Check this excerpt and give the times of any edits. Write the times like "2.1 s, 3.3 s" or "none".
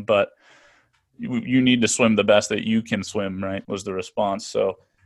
3.6 s